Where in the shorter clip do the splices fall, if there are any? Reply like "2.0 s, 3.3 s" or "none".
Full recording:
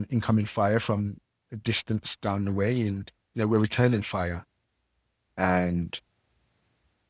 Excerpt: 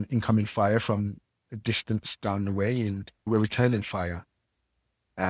3.3 s